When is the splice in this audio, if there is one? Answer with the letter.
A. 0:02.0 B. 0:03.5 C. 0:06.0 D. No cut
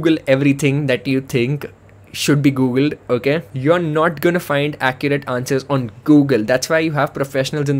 B